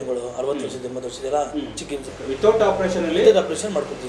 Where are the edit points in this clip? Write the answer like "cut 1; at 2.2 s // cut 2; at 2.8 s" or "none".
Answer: cut 1; at 2.1 s